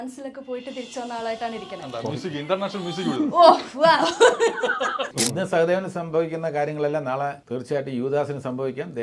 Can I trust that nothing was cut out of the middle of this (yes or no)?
no